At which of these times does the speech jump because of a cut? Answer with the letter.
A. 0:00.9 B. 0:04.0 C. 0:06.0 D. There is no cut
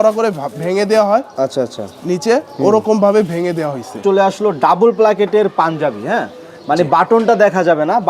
B